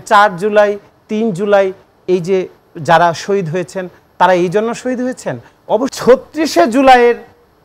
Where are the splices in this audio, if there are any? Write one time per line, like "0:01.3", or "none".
0:05.9